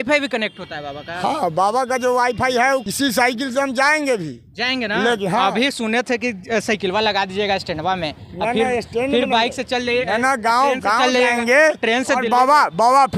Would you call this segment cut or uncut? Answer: cut